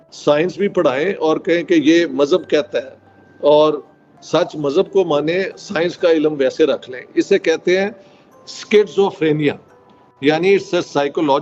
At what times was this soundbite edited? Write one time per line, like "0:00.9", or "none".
none